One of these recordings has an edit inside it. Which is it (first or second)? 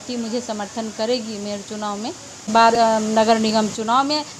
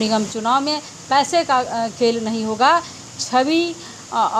first